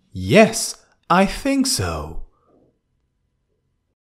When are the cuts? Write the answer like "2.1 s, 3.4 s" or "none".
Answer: 2.8 s

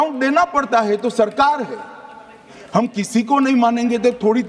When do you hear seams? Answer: 2.5 s

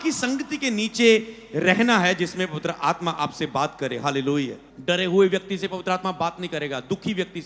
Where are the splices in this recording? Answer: 4.7 s

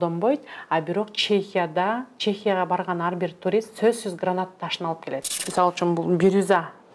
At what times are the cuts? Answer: 5.4 s

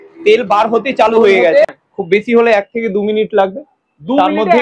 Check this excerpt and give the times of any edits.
1.7 s

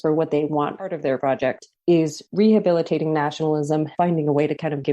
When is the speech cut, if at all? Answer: 1.0 s, 3.9 s

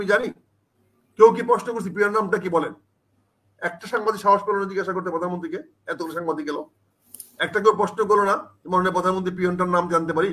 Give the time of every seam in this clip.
none

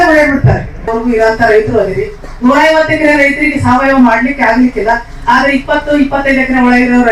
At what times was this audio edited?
0.9 s

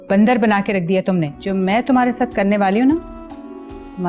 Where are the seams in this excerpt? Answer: 1.4 s

